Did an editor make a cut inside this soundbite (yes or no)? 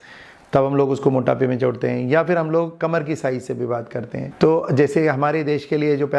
no